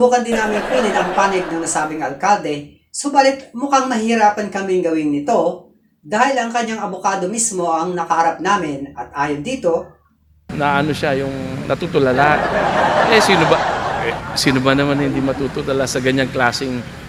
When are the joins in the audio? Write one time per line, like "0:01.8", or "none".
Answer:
none